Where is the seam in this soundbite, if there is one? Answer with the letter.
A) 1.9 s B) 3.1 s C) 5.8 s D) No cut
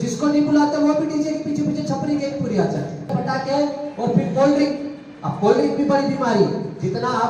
B